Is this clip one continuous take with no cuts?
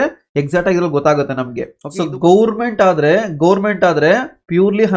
no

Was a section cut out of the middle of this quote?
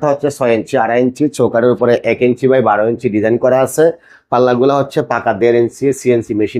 no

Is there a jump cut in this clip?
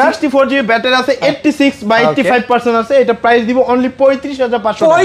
no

